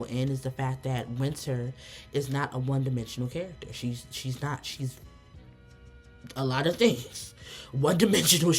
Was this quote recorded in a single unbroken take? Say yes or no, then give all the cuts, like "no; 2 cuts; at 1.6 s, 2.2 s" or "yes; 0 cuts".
yes; 0 cuts